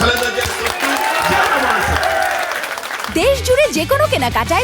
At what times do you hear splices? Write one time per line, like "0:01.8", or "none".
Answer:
none